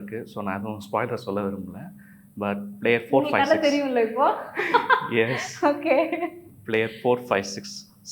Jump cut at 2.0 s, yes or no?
no